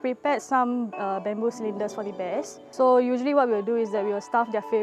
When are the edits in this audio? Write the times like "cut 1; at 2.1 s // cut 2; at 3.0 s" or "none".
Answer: cut 1; at 2.6 s